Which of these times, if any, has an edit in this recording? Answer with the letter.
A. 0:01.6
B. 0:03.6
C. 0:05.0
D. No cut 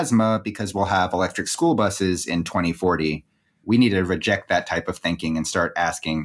B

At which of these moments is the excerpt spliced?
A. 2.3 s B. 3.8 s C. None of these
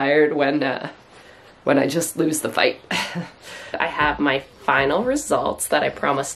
B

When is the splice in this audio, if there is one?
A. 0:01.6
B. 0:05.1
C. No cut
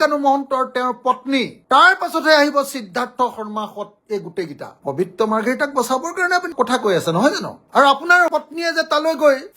A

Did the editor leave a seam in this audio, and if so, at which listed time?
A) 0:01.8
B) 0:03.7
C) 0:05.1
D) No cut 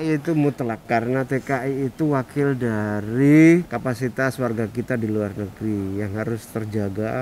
B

